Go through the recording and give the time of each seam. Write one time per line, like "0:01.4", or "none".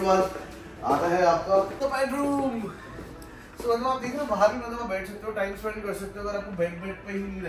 0:01.7